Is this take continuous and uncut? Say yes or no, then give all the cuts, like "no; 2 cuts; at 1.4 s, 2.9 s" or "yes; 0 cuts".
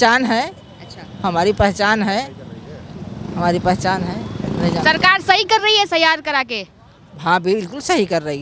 yes; 0 cuts